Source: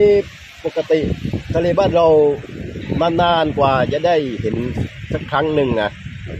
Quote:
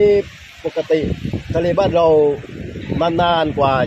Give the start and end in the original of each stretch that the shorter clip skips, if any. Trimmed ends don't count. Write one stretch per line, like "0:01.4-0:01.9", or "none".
none